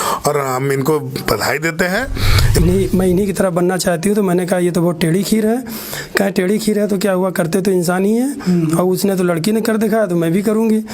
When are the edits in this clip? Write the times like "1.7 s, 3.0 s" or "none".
2.6 s